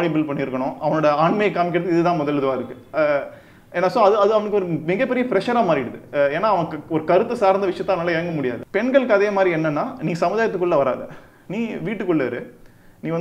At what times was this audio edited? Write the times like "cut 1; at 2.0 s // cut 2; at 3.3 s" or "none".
cut 1; at 8.6 s